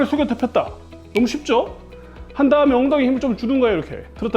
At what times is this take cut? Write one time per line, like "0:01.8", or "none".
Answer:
none